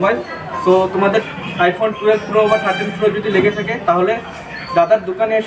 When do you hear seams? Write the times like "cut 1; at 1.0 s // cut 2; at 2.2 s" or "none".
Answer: none